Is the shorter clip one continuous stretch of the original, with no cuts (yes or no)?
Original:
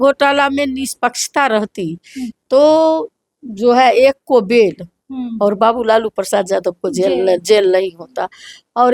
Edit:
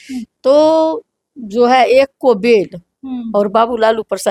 yes